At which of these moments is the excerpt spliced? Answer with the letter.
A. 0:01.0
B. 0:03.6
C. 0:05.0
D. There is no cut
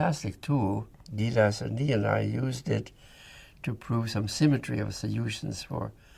A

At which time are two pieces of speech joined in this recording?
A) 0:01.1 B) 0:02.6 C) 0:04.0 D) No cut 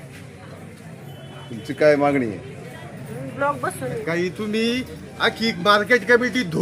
C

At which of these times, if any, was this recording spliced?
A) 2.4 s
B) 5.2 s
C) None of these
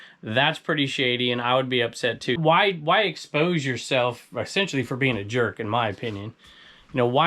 A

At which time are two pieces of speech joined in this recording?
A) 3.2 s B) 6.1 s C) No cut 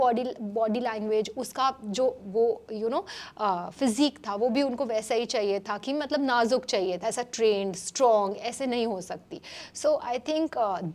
C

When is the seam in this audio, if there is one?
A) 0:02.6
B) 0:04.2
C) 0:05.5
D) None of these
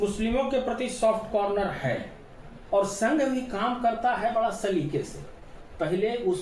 A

